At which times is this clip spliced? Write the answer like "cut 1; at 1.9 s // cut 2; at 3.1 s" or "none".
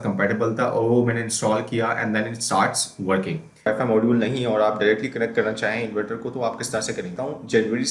cut 1; at 3.7 s // cut 2; at 7.1 s

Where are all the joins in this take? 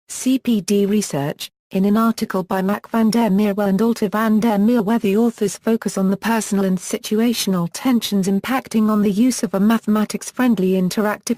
cut 1; at 3.9 s

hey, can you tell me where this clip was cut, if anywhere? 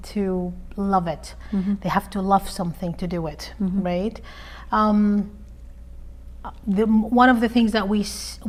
none

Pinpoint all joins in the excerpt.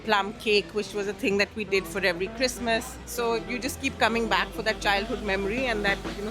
cut 1; at 3.0 s

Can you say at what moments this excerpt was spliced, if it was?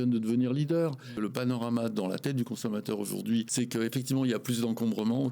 cut 1; at 1.0 s // cut 2; at 3.5 s

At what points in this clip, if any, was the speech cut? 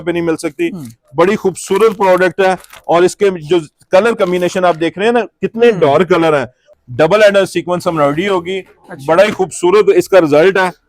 cut 1; at 6.7 s

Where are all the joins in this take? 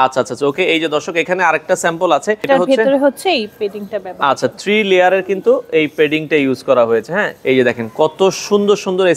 cut 1; at 2.4 s // cut 2; at 7.3 s

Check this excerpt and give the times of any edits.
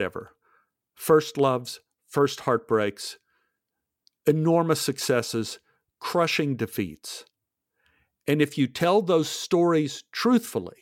none

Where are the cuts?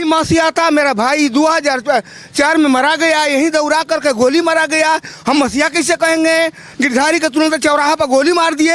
cut 1; at 6.6 s

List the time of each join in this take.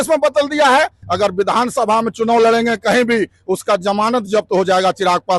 cut 1; at 1.0 s

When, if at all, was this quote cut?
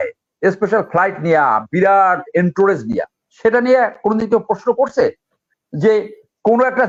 none

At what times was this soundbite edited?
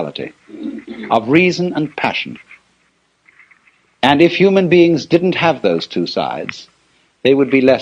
cut 1; at 5.8 s

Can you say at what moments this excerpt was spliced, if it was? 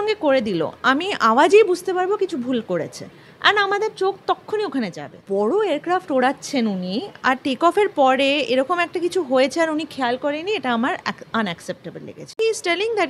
cut 1; at 5.2 s // cut 2; at 12.4 s

